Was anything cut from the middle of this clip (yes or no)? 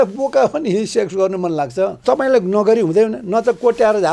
yes